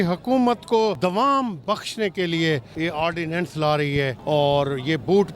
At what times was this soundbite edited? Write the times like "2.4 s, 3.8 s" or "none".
1.0 s, 2.7 s, 4.2 s